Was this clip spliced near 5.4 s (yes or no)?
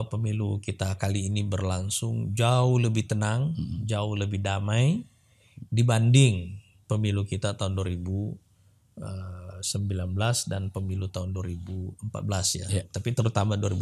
no